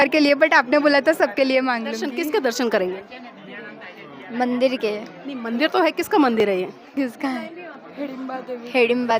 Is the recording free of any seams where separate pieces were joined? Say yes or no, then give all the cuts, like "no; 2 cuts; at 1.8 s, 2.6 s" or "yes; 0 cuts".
no; 1 cut; at 2.0 s